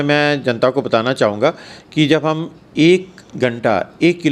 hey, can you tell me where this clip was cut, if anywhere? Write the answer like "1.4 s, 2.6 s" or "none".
3.2 s